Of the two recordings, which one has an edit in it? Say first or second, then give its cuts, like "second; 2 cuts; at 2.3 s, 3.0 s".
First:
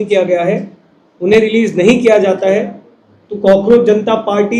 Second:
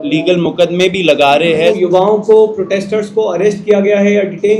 second; 1 cut; at 1.8 s